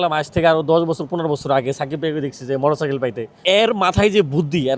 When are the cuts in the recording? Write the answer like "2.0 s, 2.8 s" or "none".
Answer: 3.4 s